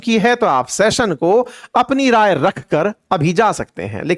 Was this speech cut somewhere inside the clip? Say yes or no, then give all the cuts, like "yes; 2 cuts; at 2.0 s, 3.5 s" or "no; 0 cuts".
no; 0 cuts